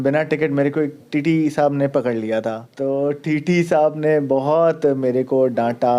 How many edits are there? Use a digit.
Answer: 1